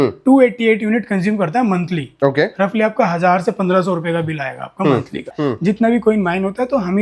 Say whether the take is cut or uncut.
cut